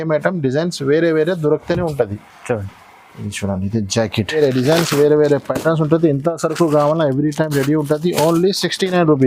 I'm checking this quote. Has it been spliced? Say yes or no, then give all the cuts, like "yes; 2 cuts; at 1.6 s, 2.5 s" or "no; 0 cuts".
yes; 1 cut; at 4.4 s